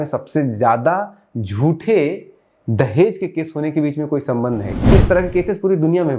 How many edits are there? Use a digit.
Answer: 1